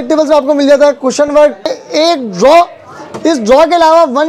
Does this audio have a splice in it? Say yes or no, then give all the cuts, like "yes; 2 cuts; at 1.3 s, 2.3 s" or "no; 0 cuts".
yes; 1 cut; at 1.7 s